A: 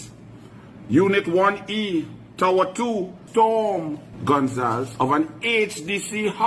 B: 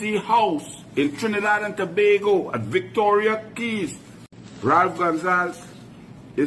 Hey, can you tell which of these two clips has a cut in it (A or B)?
A